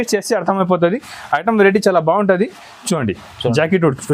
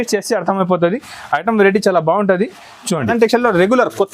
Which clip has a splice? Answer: second; 1 cut; at 3.1 s

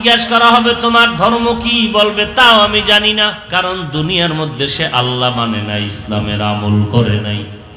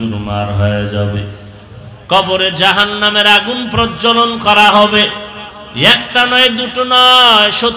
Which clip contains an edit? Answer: first; 1 cut; at 3.4 s

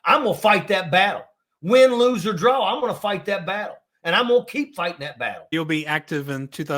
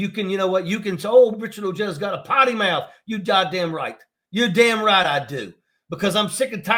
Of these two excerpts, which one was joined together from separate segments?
first; 1 cut; at 5.5 s

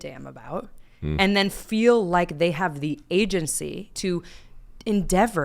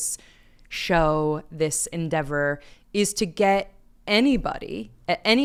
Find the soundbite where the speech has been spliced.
first; 1 cut; at 3.9 s

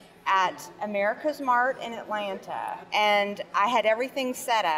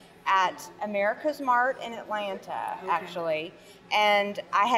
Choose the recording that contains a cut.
first; 1 cut; at 2.8 s

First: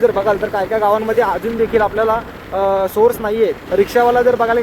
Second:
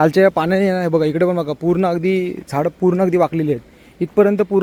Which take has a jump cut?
first; 1 cut; at 3.6 s

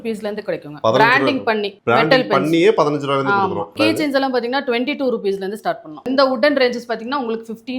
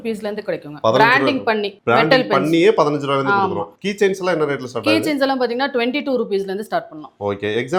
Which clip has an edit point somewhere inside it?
first; 2 cuts; at 3.7 s, 6.0 s

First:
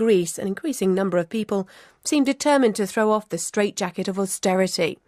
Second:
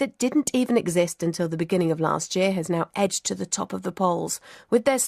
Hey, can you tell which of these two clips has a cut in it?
second; 1 cut; at 2.0 s

